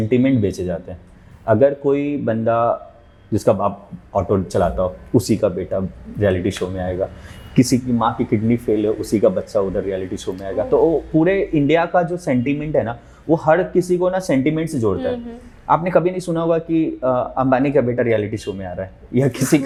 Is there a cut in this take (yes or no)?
no